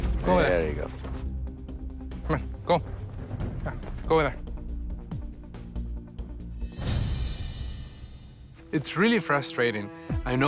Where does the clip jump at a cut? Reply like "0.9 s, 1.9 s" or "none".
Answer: none

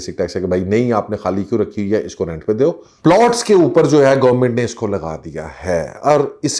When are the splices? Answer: 2.9 s

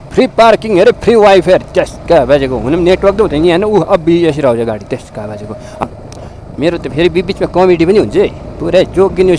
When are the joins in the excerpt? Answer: 5.8 s

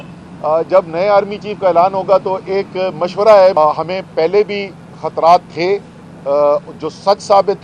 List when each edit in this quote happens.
3.6 s

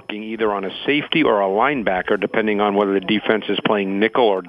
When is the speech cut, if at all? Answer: none

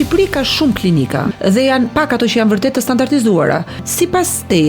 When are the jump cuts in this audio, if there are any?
1.3 s, 3.8 s

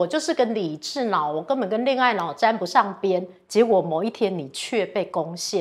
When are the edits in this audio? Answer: none

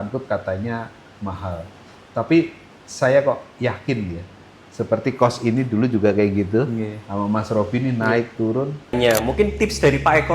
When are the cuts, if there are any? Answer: 9.0 s

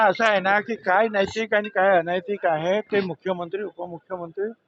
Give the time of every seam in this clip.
none

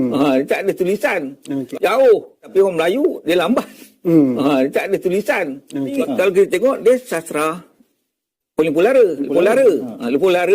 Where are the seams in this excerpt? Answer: 1.6 s, 6.0 s

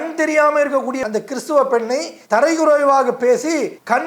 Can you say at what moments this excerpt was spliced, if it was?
1.0 s

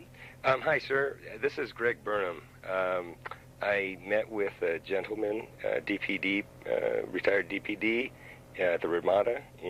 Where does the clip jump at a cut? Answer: none

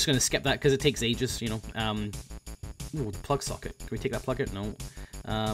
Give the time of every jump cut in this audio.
none

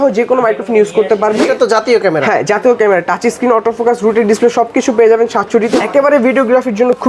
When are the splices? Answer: 1.5 s, 5.7 s

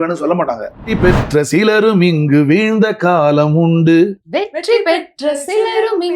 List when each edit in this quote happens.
1.0 s

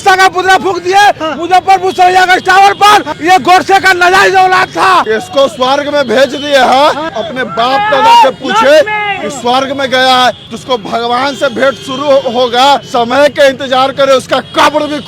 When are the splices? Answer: 3.1 s, 5.1 s, 7.2 s, 10.4 s, 12.9 s

